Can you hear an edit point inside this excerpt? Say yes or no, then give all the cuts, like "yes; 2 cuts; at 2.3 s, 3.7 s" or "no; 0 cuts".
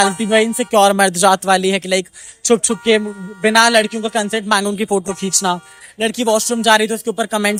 no; 0 cuts